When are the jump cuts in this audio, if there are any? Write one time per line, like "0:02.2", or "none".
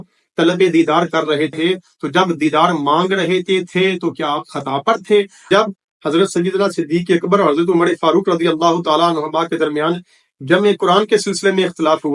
0:05.5